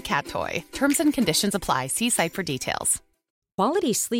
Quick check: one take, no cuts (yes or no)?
no